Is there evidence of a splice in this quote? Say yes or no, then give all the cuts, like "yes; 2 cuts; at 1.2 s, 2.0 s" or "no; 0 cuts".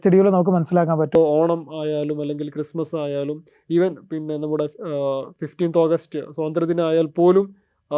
yes; 1 cut; at 1.2 s